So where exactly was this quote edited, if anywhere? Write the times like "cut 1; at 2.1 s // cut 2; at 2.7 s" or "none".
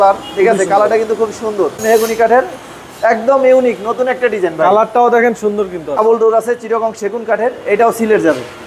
cut 1; at 1.8 s // cut 2; at 6.2 s